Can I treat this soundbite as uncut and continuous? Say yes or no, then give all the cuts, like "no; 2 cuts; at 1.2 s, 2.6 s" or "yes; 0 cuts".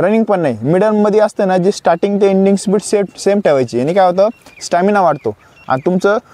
yes; 0 cuts